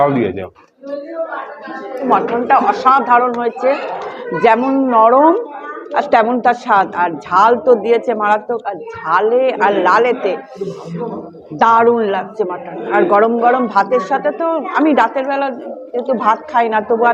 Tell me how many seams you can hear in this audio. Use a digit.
1